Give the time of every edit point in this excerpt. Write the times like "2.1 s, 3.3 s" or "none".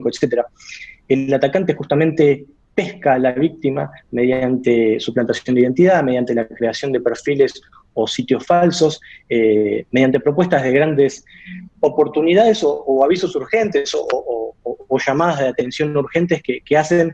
none